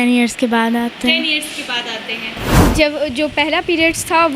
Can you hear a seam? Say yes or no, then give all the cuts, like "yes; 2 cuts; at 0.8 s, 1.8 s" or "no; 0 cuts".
yes; 1 cut; at 2.5 s